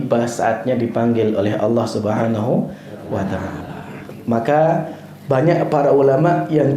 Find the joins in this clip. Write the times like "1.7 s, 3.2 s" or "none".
none